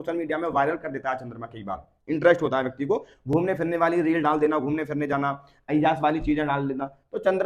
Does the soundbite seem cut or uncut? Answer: uncut